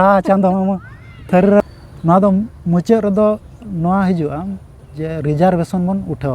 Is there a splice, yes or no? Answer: yes